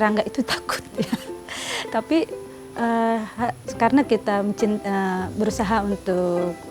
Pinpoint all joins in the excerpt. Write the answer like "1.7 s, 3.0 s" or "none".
none